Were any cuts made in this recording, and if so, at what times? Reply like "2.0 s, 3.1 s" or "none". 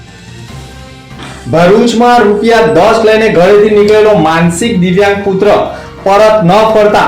0.9 s

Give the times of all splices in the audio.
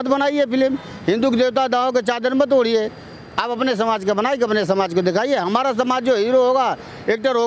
none

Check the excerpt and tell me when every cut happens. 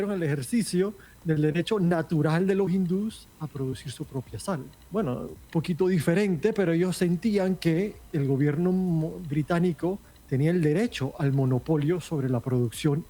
1.1 s, 4.8 s, 5.4 s, 10.1 s

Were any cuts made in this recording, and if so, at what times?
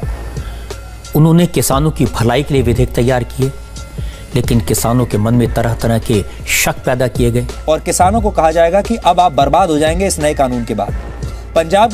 none

